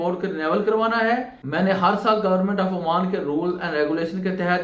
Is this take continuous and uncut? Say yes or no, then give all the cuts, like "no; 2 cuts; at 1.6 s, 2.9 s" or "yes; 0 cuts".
no; 1 cut; at 1.4 s